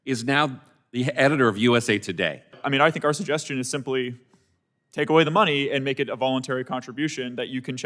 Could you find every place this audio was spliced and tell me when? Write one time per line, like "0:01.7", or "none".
0:02.6